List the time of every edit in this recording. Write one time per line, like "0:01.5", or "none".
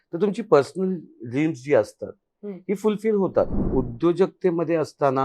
0:03.6